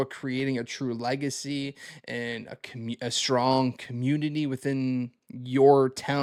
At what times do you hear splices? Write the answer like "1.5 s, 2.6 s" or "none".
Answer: none